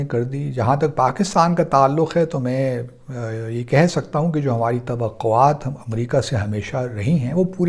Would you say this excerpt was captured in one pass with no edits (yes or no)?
yes